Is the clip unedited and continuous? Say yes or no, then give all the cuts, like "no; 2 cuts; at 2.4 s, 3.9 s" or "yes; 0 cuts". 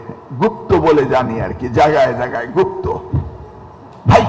yes; 0 cuts